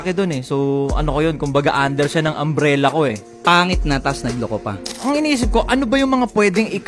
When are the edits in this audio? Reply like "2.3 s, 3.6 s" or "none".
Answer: 4.9 s